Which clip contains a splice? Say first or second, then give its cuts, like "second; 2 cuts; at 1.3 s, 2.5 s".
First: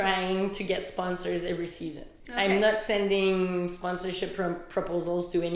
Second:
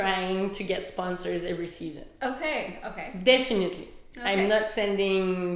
first; 1 cut; at 2.0 s